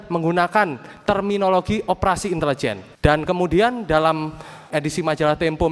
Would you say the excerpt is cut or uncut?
cut